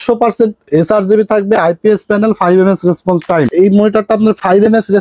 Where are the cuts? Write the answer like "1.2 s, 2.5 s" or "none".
3.5 s